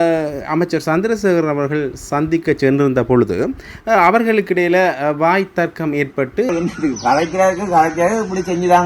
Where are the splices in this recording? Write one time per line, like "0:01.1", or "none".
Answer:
0:06.5